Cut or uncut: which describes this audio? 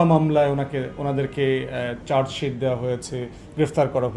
uncut